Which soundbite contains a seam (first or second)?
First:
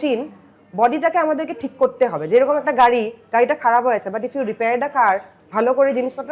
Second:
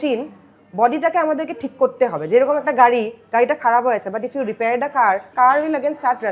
second